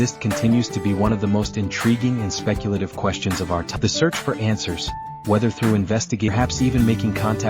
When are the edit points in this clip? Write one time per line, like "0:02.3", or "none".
0:03.8
0:06.3